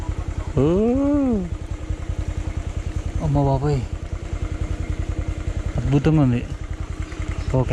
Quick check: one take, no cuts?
yes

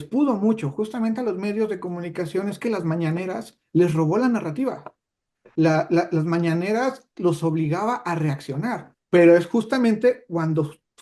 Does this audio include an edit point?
yes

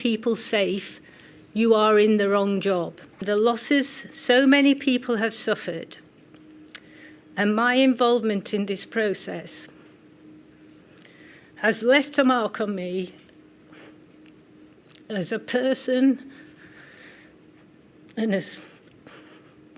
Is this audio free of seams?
no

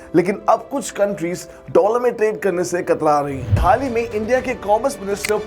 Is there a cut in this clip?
yes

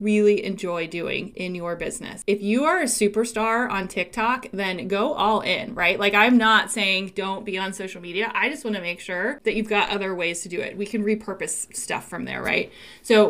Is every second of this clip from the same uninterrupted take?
no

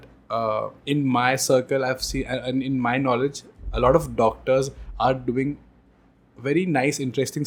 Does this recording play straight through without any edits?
yes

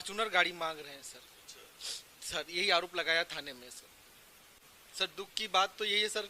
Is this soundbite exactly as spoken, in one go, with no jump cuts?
no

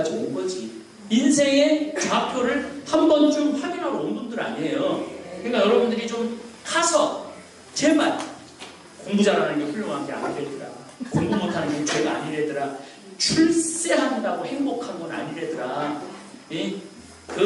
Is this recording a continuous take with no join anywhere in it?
yes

